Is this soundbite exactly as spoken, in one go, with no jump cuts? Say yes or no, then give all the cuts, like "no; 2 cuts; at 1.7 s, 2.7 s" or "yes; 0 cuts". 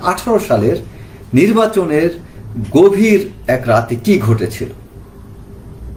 yes; 0 cuts